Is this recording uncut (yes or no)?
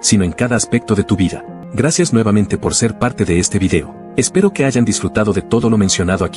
no